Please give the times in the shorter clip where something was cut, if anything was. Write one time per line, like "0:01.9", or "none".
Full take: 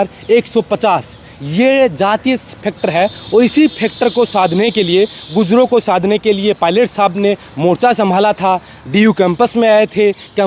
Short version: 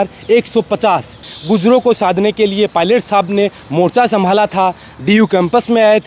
0:01.3